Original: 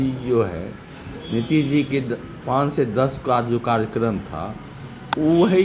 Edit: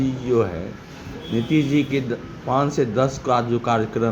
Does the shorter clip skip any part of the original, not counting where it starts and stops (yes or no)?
no